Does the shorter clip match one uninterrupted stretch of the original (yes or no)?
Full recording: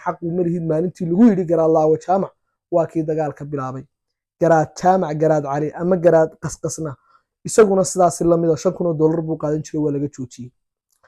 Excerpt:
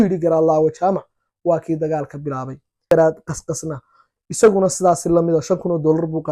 no